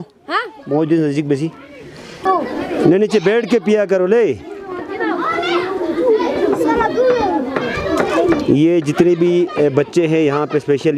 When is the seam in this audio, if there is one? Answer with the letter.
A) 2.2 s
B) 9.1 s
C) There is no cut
A